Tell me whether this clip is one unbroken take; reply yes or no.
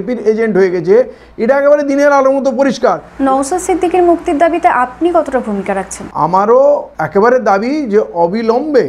no